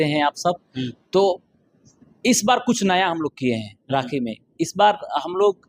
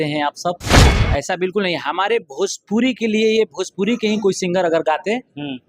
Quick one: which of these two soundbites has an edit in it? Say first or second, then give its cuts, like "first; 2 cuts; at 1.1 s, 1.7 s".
second; 1 cut; at 1.0 s